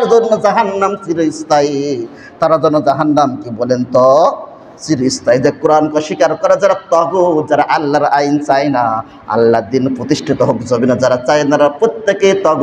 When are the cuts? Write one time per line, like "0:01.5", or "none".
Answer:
none